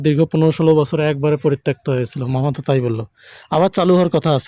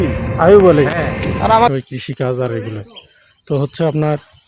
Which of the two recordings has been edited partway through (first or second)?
second